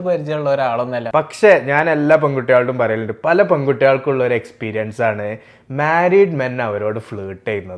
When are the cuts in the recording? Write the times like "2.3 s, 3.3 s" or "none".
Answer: 1.1 s